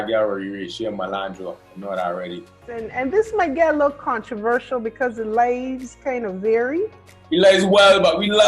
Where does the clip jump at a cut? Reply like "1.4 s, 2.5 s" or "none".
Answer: 2.8 s